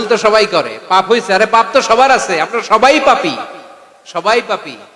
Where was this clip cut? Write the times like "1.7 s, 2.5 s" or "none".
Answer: none